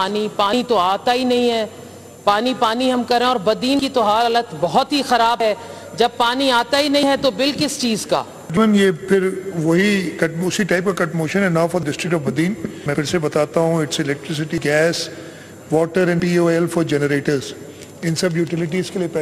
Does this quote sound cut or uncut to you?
cut